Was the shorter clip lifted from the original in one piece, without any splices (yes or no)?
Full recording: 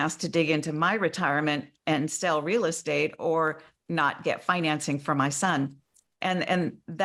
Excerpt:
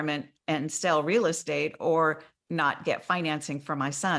yes